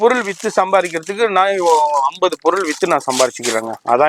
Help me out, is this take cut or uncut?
uncut